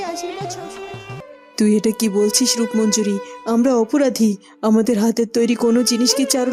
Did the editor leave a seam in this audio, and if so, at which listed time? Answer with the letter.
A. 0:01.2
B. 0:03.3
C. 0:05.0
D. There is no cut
A